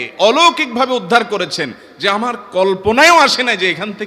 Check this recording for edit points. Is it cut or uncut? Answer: uncut